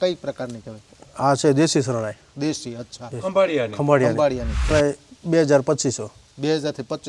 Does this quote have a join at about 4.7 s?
yes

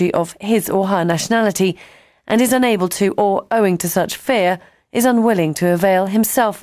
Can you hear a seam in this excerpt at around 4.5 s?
yes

